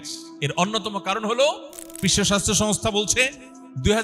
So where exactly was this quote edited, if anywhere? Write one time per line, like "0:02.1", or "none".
0:02.0